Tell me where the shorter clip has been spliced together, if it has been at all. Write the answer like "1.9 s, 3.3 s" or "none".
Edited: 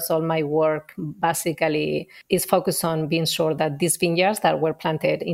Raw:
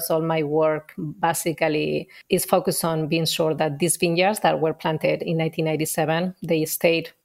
none